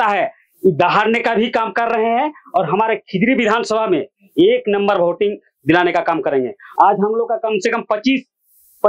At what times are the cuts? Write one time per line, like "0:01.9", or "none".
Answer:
none